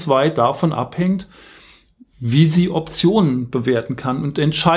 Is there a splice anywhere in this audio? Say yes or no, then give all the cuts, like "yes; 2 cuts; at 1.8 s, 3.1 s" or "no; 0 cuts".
no; 0 cuts